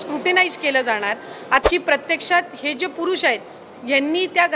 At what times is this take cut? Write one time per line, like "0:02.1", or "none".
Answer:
0:01.6